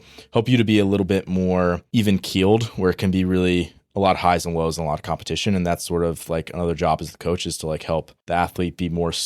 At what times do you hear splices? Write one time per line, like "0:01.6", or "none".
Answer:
0:01.8
0:08.2

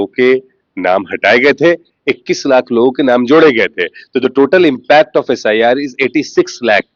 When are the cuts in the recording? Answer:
none

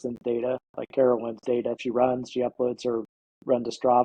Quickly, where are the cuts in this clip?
0:01.8

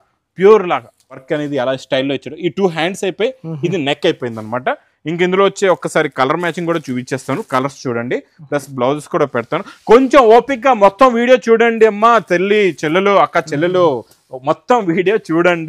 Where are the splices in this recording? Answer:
0:01.2

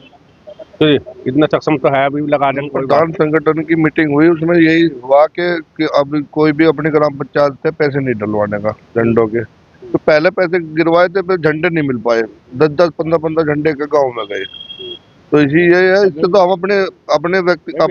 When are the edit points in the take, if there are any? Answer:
0:02.8

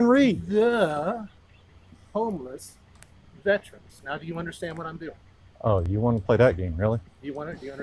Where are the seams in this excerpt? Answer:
none

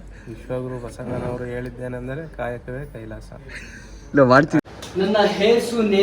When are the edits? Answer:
0:04.6

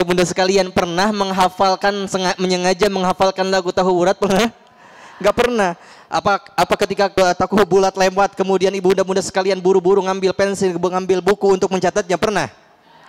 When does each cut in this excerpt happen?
0:07.1

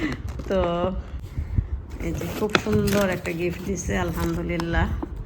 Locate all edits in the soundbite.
0:01.2

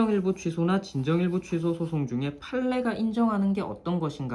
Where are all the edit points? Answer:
none

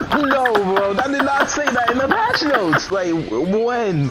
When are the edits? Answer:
0:02.9

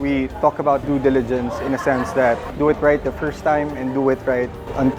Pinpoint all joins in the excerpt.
0:00.8
0:02.5

